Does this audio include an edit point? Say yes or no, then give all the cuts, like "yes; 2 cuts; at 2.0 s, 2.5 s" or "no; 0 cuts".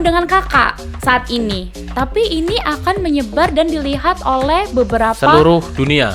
no; 0 cuts